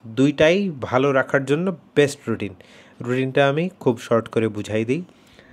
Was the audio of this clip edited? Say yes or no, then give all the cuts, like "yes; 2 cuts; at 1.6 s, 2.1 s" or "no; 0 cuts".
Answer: no; 0 cuts